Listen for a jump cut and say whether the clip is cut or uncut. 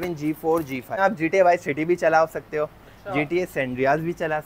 cut